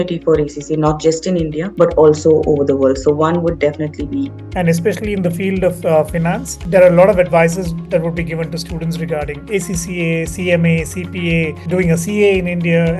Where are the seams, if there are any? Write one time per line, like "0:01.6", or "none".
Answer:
0:01.6
0:04.4
0:06.6
0:11.6

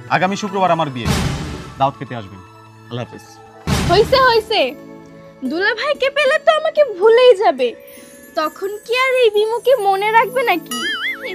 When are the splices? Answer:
0:03.9

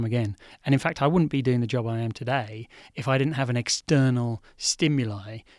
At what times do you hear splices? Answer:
none

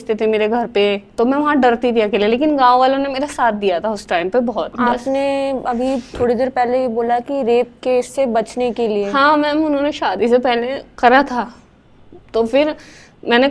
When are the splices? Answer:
0:04.7

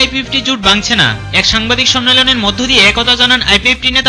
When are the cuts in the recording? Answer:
none

